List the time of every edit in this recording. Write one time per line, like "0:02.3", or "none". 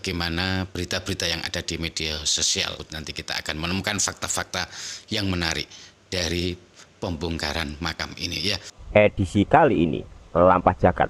0:02.8
0:08.7